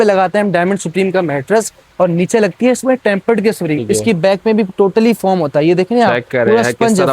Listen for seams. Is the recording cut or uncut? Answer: cut